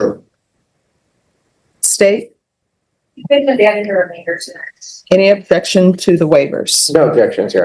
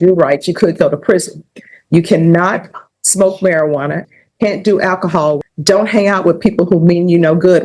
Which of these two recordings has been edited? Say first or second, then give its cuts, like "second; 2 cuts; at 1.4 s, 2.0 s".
second; 2 cuts; at 4.0 s, 5.4 s